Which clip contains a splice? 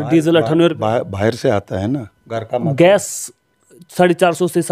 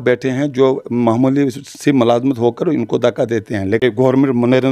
second; 1 cut; at 3.8 s

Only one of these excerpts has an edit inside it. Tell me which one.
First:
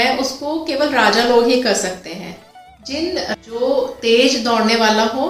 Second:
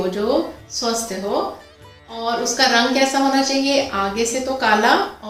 first; 1 cut; at 3.3 s

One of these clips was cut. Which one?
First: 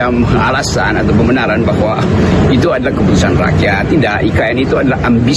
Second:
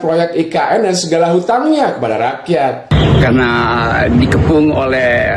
second; 1 cut; at 2.9 s

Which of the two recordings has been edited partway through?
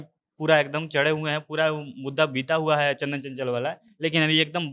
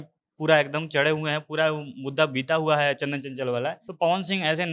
second; 1 cut; at 3.8 s

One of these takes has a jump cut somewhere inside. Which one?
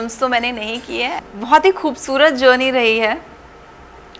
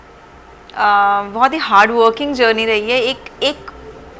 first; 1 cut; at 1.2 s

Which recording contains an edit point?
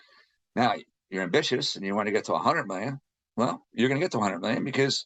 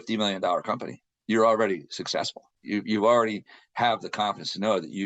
second; 1 cut; at 2.6 s

